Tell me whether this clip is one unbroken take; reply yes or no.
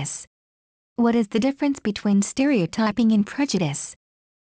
yes